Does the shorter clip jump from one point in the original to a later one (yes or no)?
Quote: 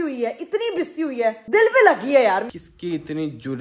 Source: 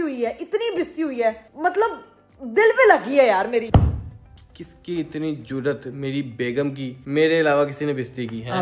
yes